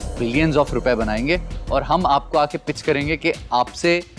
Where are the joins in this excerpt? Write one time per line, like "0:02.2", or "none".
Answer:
none